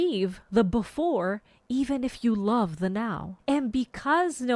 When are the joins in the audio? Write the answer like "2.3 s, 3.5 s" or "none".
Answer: 3.3 s